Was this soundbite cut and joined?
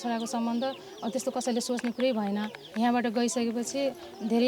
yes; 1 cut; at 2.6 s

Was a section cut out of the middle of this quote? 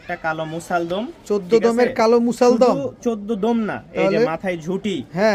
no; 0 cuts

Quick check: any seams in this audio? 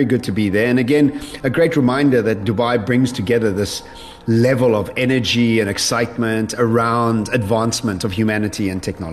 no; 0 cuts

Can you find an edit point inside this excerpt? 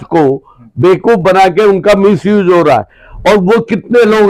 no; 0 cuts

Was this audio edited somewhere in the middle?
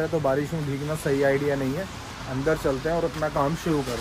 no; 0 cuts

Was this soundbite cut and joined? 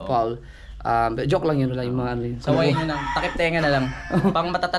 no; 0 cuts

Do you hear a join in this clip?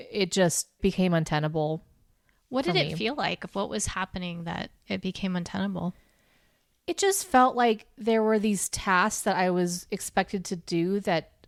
no; 0 cuts

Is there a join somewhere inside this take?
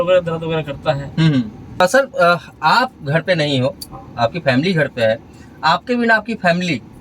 yes; 1 cut; at 1.8 s

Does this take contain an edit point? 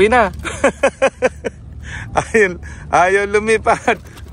no; 0 cuts

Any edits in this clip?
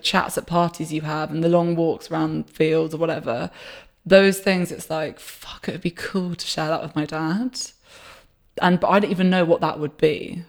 no; 0 cuts

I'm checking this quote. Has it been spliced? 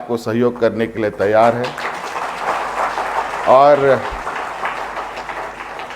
no; 0 cuts

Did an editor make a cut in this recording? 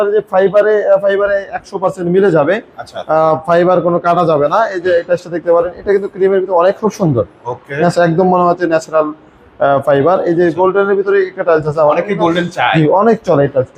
no; 0 cuts

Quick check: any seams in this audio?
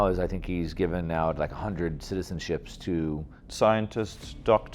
yes; 1 cut; at 3.4 s

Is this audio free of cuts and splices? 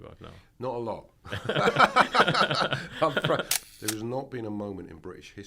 no; 1 cut; at 3.5 s

